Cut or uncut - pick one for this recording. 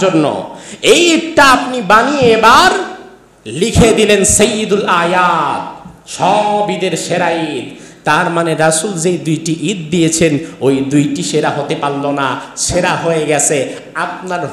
uncut